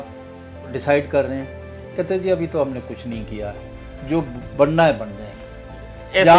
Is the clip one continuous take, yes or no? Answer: yes